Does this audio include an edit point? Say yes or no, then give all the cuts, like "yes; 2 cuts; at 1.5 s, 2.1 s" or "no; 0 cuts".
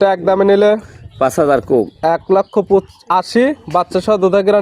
no; 0 cuts